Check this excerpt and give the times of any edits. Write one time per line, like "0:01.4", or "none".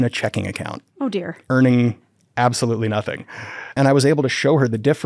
0:03.8

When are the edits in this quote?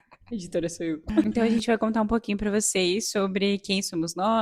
none

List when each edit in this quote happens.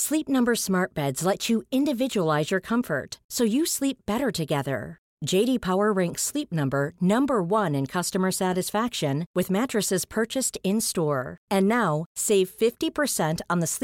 none

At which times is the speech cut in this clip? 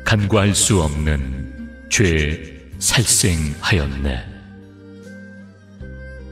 0:04.5

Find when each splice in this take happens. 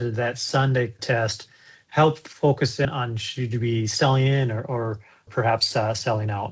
0:01.0
0:02.9
0:05.3

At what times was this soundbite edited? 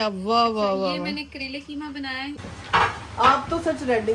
0:02.4

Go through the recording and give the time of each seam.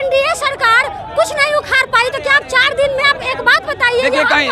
none

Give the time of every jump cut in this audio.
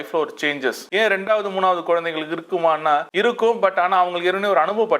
0:00.8
0:03.1

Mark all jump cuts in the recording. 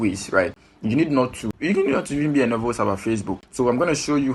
0:01.5
0:03.4

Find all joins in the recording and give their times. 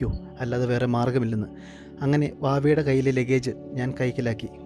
none

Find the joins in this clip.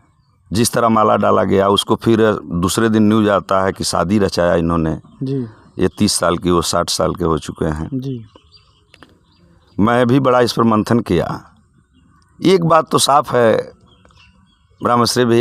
none

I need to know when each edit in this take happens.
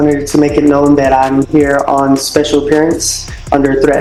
none

